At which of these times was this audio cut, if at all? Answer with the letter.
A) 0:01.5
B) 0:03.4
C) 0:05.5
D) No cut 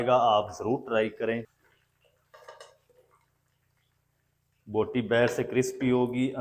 A